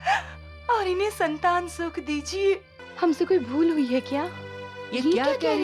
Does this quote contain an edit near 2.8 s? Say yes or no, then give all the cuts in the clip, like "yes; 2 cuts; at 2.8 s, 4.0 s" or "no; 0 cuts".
yes; 1 cut; at 2.8 s